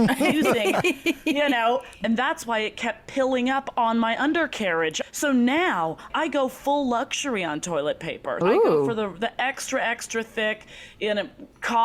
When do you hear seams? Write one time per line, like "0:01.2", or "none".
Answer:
0:02.0
0:05.0
0:06.1
0:08.4

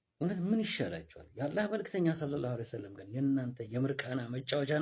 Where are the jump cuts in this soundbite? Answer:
none

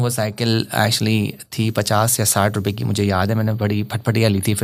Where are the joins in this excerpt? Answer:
none

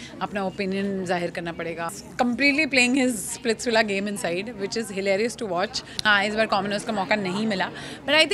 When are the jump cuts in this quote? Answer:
0:01.9
0:05.9

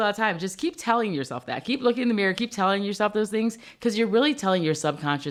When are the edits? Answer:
none

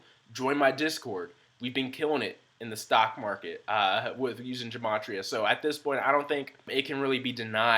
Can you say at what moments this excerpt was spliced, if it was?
0:06.7

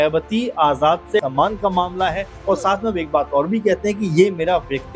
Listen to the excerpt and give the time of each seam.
0:01.2

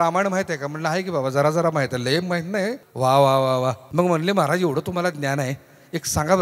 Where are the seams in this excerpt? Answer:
0:02.8
0:03.8

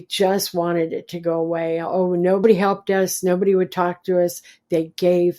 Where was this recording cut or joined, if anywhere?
0:02.4

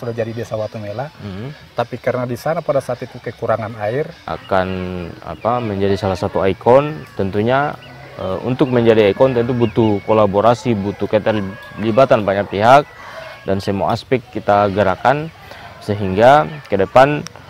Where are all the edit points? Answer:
0:04.2

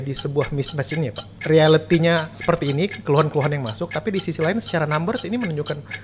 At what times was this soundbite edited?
0:01.3
0:02.3

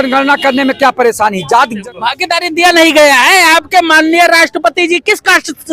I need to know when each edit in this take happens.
0:01.8

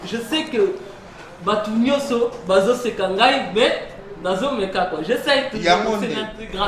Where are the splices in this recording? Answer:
none

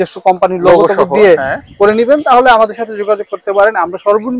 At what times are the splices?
none

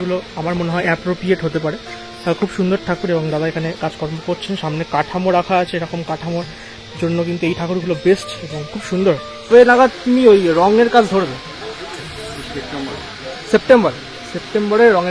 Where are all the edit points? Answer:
0:09.5

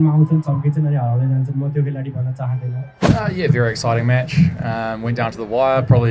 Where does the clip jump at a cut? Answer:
0:02.9

